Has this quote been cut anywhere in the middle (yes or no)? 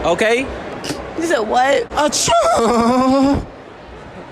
yes